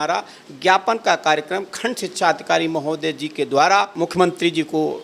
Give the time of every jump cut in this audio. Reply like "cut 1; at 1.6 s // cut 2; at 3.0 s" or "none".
cut 1; at 3.9 s